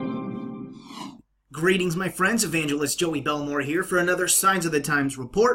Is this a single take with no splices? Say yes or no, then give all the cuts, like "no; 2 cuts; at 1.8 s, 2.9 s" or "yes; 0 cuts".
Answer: yes; 0 cuts